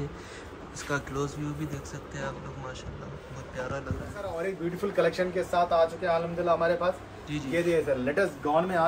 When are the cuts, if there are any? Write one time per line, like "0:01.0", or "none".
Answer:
0:04.3